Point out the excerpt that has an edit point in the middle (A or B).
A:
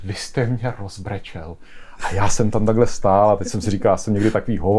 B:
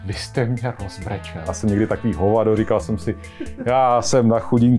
B